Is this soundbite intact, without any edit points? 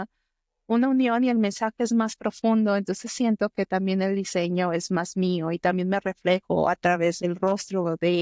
no; 1 cut; at 7.2 s

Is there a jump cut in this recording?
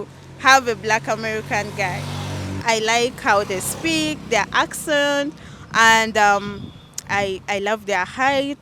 yes; 1 cut; at 2.6 s

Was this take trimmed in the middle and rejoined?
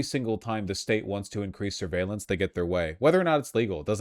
no; 0 cuts

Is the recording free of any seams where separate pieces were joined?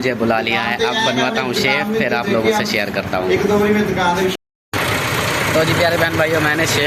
yes; 0 cuts

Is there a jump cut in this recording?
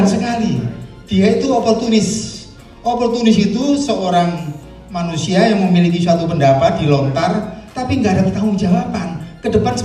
no; 0 cuts

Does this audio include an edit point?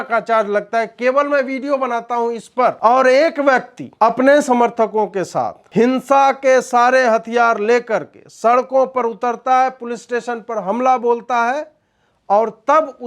yes; 3 cuts; at 2.8 s, 3.8 s, 5.6 s

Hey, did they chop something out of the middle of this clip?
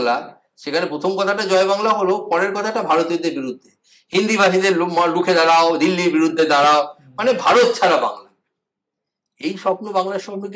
no; 0 cuts

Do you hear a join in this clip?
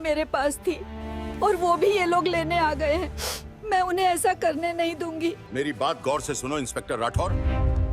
yes; 1 cut; at 5.4 s

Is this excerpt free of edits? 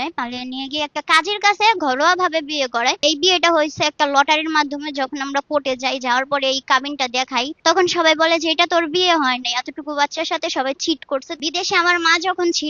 no; 3 cuts; at 3.0 s, 7.5 s, 11.4 s

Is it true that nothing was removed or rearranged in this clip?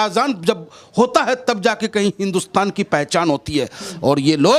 yes; 0 cuts

